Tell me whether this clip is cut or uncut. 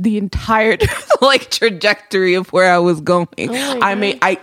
uncut